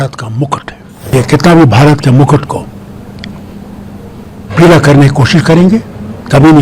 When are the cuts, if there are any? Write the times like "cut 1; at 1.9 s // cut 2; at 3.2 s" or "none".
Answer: cut 1; at 1.1 s